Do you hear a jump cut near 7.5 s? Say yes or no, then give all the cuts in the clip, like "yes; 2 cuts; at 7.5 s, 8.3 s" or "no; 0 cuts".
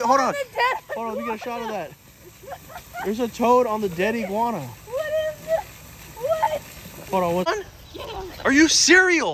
yes; 1 cut; at 7.5 s